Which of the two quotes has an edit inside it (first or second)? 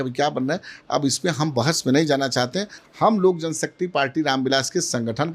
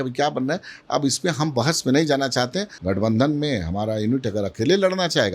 second